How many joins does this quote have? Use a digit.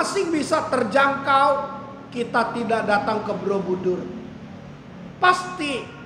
0